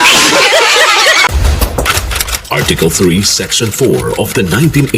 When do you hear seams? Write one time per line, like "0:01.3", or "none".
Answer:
0:01.3